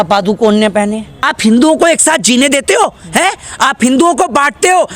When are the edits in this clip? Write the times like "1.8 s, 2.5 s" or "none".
1.1 s